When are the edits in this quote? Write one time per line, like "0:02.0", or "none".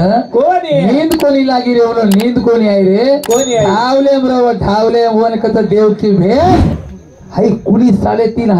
0:06.7